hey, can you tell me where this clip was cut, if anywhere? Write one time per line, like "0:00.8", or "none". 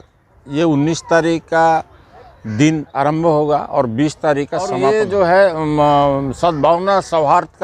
0:04.8